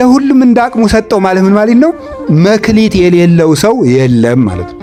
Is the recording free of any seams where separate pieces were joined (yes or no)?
yes